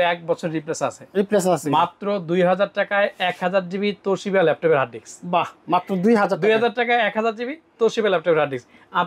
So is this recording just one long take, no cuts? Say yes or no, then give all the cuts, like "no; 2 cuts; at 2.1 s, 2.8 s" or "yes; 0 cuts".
yes; 0 cuts